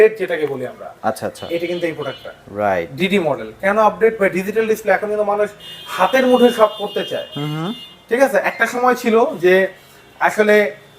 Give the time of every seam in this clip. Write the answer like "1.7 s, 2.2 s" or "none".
none